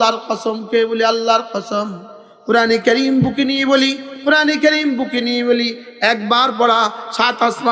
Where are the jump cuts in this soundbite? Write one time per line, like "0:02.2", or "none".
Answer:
none